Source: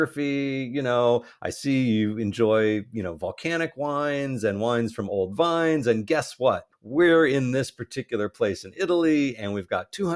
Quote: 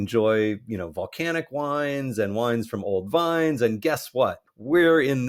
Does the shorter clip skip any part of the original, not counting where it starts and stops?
no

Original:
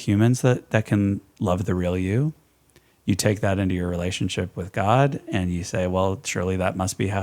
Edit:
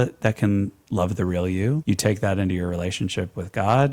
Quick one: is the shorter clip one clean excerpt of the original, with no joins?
no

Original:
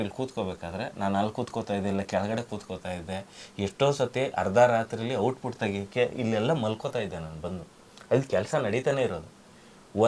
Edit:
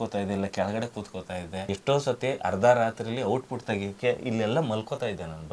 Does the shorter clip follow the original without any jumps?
no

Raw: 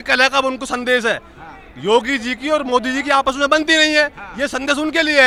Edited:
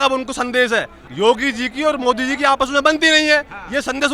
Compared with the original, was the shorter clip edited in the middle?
yes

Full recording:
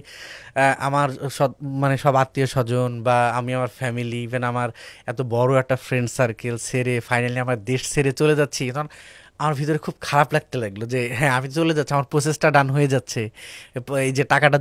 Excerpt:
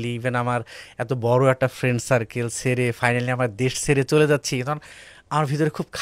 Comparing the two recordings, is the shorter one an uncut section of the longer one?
yes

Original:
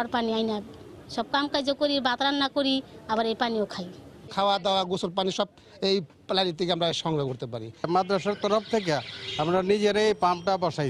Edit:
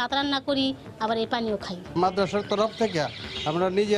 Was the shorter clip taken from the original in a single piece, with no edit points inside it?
no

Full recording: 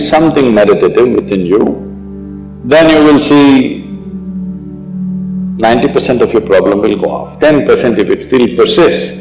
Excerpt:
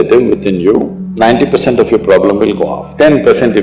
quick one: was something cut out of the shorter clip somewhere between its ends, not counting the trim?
yes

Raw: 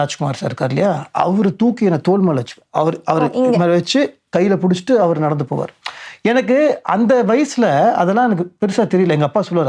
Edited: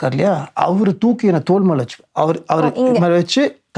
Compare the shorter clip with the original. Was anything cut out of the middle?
no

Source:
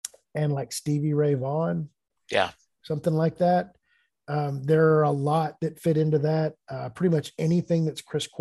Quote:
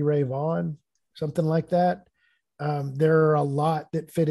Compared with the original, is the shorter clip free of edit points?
no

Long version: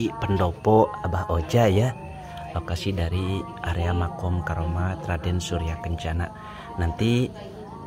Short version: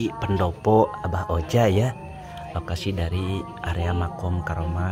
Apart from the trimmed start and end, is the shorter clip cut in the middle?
no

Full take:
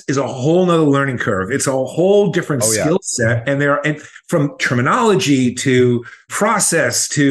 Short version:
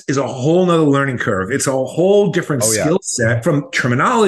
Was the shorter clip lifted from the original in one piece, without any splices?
no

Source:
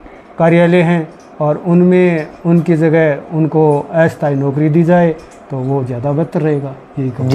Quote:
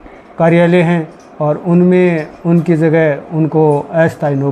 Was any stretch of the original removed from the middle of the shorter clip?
no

